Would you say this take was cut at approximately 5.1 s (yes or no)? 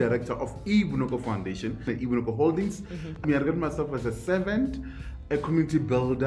yes